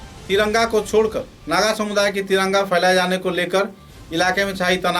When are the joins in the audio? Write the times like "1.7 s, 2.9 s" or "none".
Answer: none